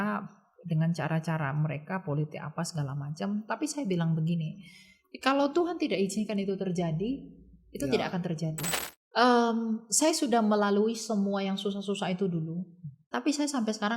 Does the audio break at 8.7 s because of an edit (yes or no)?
yes